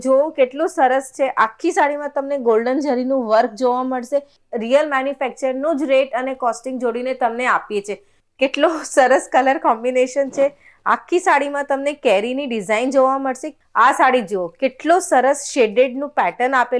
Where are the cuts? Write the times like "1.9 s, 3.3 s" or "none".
4.4 s, 8.1 s, 13.5 s